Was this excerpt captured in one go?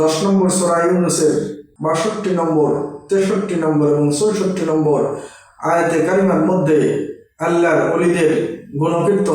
no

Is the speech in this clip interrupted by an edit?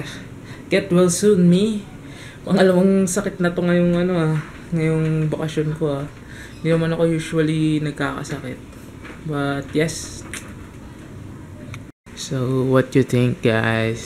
yes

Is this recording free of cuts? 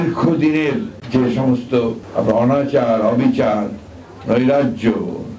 no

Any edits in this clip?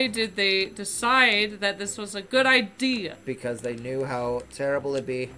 no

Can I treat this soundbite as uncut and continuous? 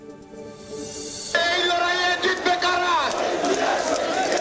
no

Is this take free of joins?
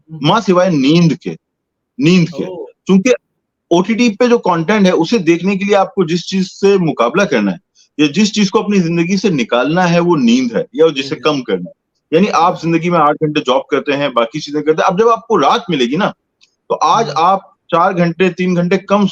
yes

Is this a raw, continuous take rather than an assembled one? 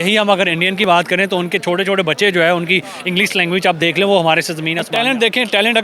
no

